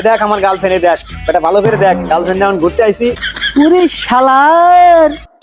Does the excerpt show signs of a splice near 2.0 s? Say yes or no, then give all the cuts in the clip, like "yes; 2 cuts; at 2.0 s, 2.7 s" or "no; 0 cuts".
no; 1 cut; at 3.2 s